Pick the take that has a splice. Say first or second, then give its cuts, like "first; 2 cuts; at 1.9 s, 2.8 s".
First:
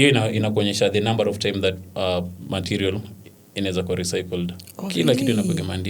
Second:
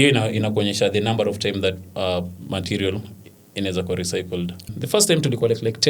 second; 1 cut; at 4.7 s